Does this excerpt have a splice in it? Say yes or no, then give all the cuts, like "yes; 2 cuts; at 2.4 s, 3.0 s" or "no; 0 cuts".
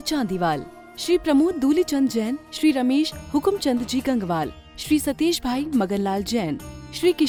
no; 0 cuts